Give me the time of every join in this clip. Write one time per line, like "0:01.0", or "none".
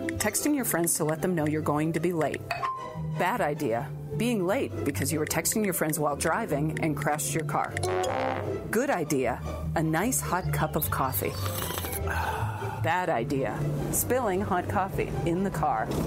none